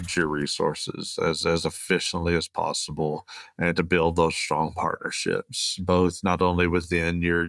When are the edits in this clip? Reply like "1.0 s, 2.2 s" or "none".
none